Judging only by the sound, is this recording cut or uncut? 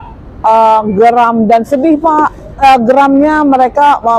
cut